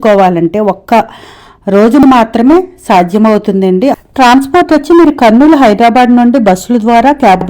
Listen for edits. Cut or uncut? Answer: cut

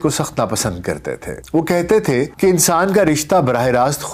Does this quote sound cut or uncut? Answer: cut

